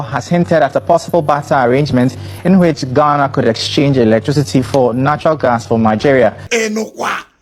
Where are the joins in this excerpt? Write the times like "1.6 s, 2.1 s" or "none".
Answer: 6.4 s

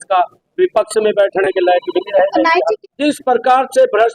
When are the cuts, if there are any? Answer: 2.8 s

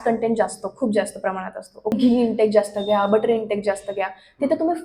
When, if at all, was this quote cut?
1.9 s

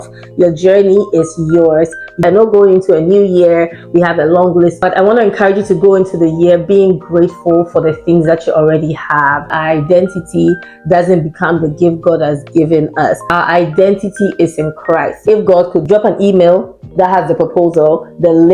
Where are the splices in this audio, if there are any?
2.2 s, 4.8 s, 9.6 s, 15.2 s

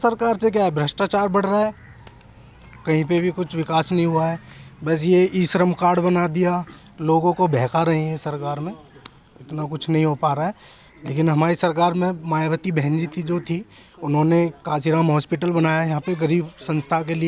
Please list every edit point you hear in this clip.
none

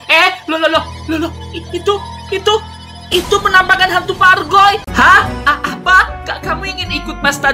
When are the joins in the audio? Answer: 4.8 s

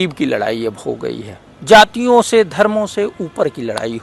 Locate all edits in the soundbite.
none

